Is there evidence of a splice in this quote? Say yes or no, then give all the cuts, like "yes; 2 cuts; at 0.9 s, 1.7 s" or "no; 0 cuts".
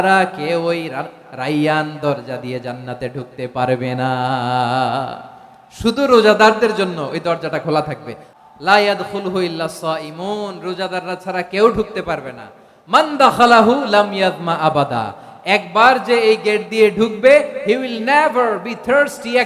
yes; 1 cut; at 8.3 s